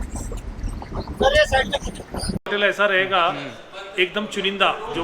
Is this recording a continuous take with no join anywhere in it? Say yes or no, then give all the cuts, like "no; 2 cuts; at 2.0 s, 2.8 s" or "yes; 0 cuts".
no; 1 cut; at 2.5 s